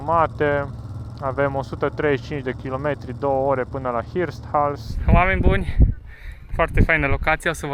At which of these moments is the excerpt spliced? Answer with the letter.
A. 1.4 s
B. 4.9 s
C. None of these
B